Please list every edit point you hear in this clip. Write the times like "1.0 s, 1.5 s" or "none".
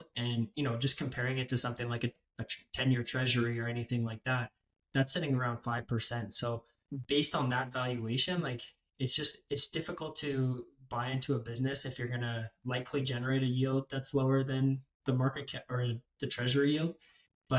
6.7 s